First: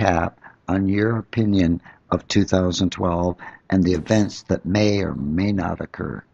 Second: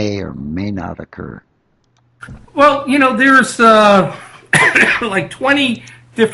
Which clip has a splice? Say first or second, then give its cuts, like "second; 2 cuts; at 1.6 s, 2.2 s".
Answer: second; 1 cut; at 3.0 s